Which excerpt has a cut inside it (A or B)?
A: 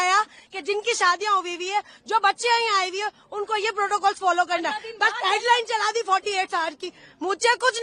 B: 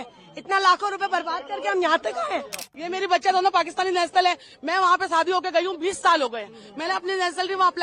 B